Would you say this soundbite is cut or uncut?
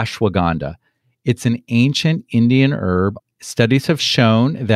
cut